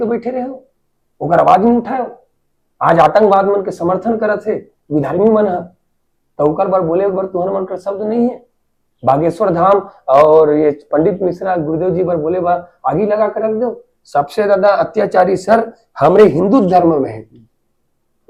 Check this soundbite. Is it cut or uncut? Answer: uncut